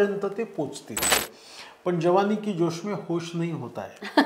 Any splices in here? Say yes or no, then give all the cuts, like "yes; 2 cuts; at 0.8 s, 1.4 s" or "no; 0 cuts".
yes; 1 cut; at 1.1 s